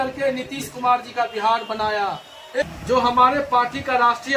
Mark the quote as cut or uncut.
cut